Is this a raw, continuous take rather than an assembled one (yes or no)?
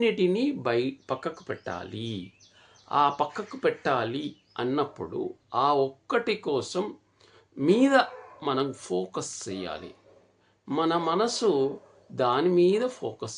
yes